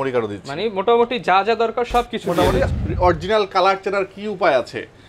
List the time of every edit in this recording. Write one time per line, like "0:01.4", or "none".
0:02.7